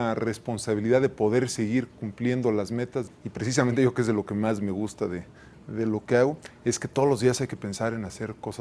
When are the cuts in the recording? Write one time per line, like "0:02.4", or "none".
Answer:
0:03.1

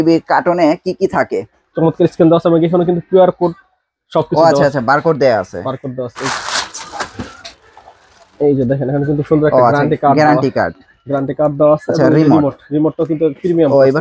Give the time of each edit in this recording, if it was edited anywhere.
0:01.6
0:06.2

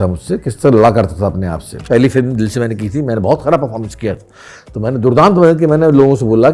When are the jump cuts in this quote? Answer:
0:01.8

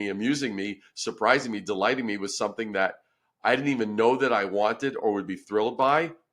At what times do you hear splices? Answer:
none

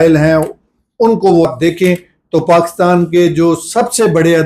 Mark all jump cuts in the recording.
0:01.4

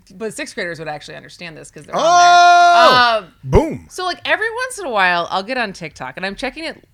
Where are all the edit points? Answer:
none

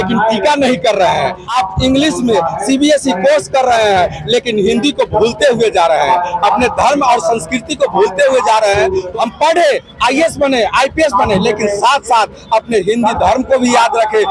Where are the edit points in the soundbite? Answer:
0:01.4
0:09.1

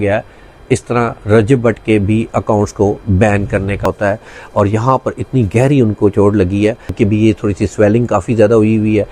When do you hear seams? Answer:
0:03.9
0:06.9

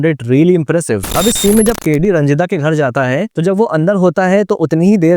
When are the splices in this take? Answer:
0:01.1

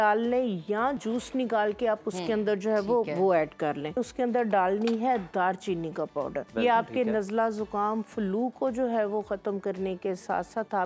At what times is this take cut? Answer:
0:01.0
0:04.0
0:06.5

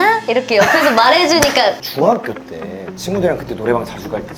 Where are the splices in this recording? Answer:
0:01.8

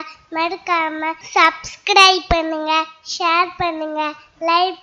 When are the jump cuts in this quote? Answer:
0:01.2

